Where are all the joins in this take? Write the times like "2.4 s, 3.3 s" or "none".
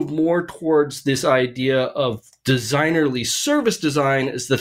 none

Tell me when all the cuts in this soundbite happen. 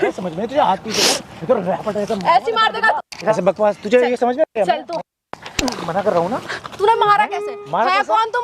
3.2 s

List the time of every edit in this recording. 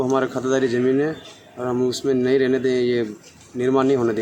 none

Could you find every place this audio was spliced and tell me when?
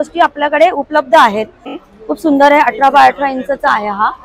1.7 s

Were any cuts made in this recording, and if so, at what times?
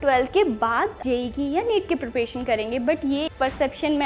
1.0 s

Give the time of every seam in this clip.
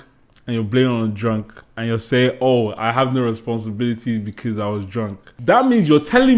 1.8 s, 5.3 s

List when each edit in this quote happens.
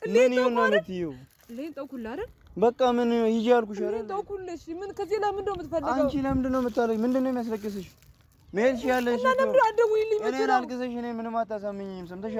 none

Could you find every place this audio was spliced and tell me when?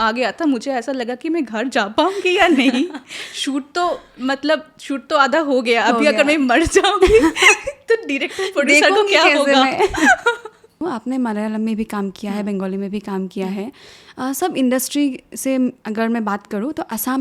10.8 s

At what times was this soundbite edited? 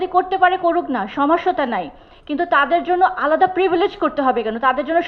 none

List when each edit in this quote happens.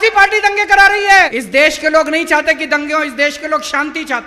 1.3 s

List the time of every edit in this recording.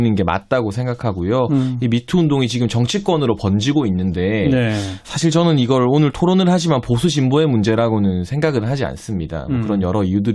none

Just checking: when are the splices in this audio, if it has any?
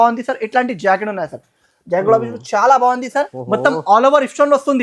3.4 s

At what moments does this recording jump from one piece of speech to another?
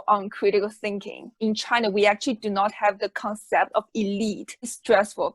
1.2 s, 4.5 s

